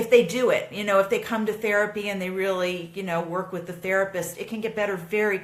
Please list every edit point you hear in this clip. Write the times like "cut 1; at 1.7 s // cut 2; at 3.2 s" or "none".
none